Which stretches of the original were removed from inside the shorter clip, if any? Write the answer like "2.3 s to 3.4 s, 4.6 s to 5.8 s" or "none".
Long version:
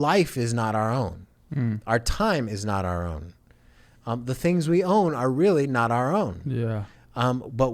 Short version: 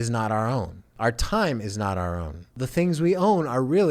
1.4 s to 1.8 s, 3.4 s to 4.2 s